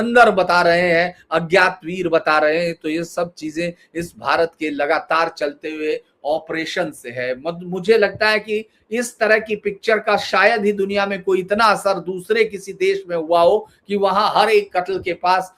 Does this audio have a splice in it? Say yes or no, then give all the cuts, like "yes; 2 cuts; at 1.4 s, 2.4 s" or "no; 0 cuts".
no; 0 cuts